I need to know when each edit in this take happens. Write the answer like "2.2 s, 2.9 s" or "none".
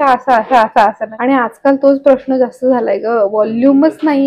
1.1 s